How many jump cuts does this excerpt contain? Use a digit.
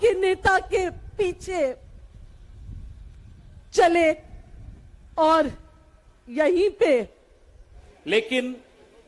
1